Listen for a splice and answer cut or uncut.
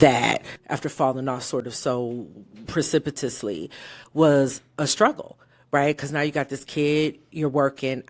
uncut